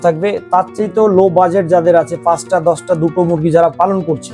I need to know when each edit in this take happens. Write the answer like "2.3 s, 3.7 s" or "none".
none